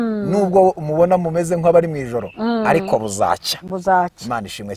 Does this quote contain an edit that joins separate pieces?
no; 0 cuts

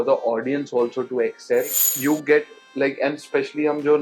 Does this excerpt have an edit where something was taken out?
yes; 1 cut; at 1.9 s

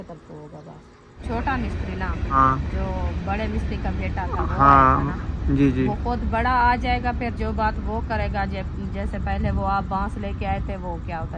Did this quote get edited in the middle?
yes; 2 cuts; at 1.2 s, 2.3 s

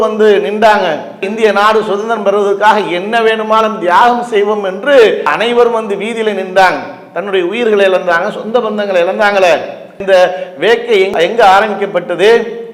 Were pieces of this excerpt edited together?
no; 0 cuts

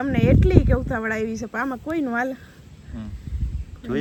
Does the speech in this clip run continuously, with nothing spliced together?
yes; 0 cuts

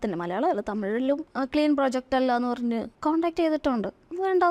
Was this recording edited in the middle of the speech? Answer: yes; 2 cuts; at 1.3 s, 2.9 s

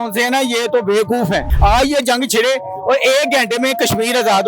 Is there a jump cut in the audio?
yes; 1 cut; at 1.5 s

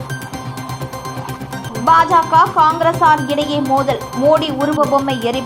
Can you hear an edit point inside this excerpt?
no; 0 cuts

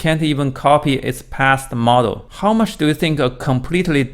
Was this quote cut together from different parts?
yes; 1 cut; at 2.3 s

